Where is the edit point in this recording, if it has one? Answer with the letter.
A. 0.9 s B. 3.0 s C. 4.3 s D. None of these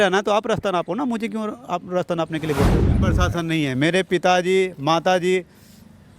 B